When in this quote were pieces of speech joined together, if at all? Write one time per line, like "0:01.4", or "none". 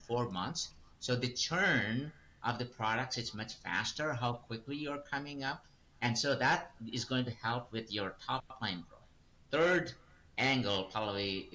none